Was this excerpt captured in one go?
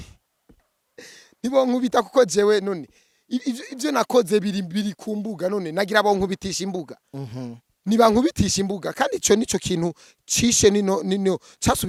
yes; 0 cuts

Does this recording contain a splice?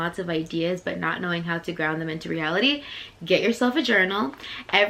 no; 0 cuts

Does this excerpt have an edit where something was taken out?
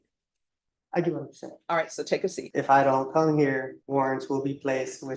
yes; 2 cuts; at 2.4 s, 3.8 s

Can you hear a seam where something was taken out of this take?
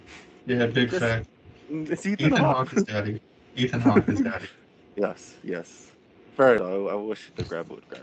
yes; 1 cut; at 6.6 s

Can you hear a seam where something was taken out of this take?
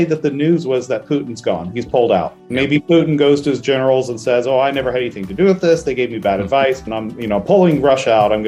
yes; 1 cut; at 7.0 s

